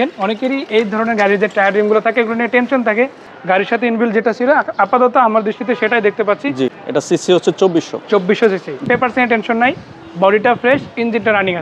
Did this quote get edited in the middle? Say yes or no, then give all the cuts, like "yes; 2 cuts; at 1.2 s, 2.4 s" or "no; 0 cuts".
yes; 3 cuts; at 3.3 s, 6.8 s, 8.8 s